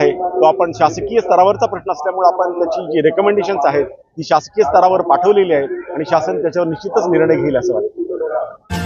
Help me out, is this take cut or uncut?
uncut